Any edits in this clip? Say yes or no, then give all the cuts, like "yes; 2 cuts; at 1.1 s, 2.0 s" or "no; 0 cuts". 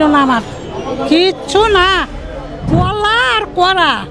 yes; 1 cut; at 2.6 s